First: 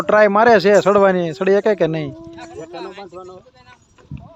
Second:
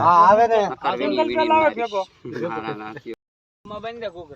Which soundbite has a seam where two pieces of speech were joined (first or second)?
second